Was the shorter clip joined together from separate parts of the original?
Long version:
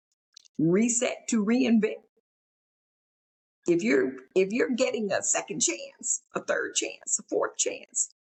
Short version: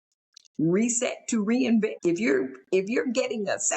yes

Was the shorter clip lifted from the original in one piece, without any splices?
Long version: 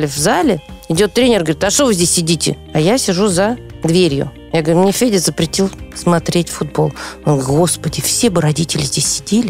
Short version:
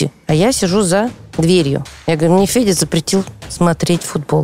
yes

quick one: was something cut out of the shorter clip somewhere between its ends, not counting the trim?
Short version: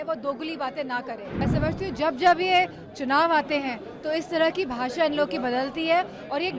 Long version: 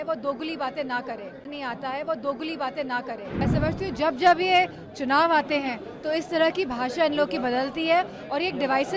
yes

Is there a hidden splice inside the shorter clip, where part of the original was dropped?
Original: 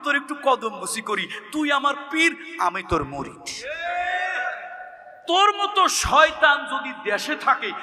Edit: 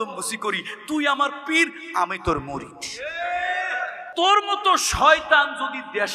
yes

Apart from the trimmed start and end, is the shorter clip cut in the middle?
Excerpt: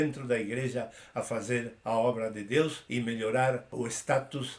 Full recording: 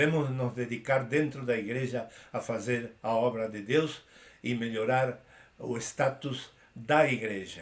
yes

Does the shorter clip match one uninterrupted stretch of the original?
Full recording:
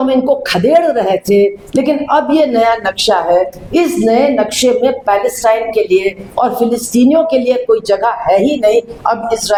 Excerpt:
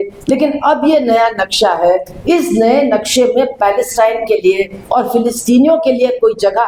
yes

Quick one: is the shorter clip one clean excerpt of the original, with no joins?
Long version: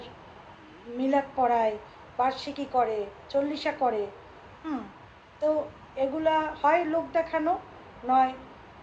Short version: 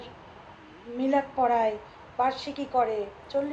yes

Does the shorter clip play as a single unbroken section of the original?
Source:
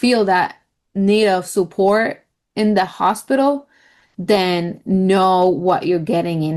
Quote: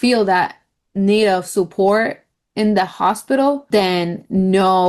no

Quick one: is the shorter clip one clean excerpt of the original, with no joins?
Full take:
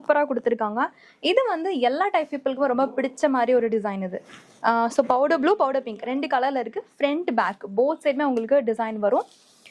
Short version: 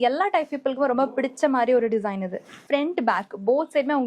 no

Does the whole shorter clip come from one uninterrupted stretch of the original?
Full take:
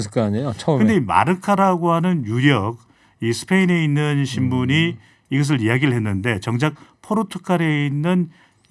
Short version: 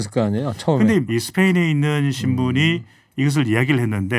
no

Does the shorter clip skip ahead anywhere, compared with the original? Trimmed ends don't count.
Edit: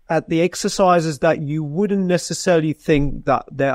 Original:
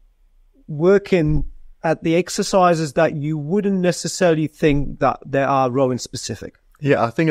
no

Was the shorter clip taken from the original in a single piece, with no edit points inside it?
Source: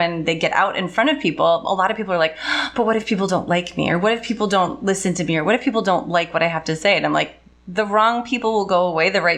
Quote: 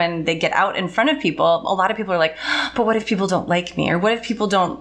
yes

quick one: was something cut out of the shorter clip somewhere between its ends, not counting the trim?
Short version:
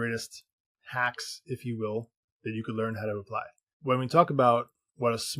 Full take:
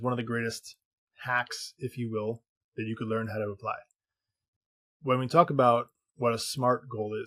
yes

